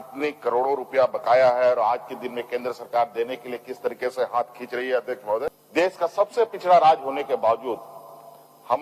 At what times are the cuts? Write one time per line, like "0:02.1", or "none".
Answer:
0:05.6